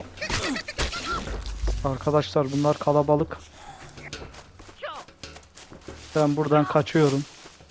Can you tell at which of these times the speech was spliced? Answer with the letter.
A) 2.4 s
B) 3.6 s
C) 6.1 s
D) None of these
D